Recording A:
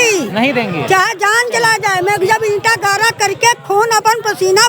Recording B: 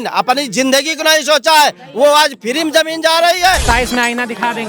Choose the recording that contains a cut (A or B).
B